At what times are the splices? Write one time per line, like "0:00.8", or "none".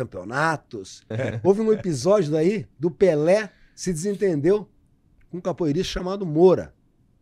0:01.1